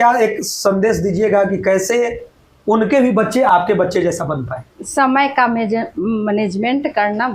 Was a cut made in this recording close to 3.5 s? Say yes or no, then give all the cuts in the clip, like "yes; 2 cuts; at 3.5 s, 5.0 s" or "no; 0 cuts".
yes; 1 cut; at 3.5 s